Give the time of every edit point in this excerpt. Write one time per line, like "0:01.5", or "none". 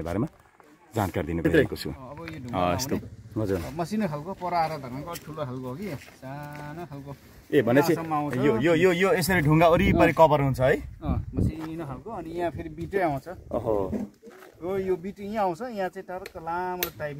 0:03.0